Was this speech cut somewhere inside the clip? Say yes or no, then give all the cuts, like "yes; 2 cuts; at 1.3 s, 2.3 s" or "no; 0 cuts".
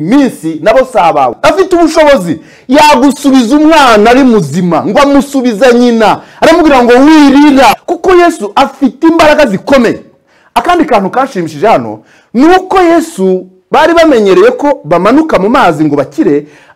yes; 2 cuts; at 1.4 s, 7.7 s